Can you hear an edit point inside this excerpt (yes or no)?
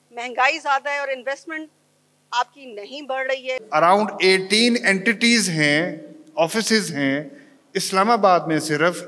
yes